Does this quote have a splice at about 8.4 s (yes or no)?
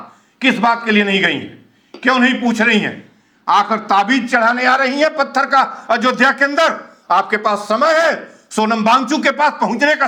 no